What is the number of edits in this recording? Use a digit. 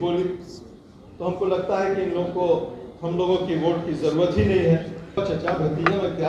1